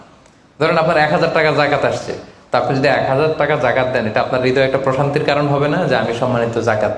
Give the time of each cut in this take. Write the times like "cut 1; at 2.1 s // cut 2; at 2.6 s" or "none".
none